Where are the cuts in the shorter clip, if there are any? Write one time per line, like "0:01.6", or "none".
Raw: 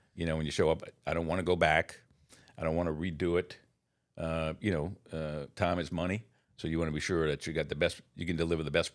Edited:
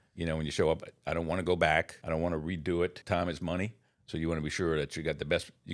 0:02.0
0:03.0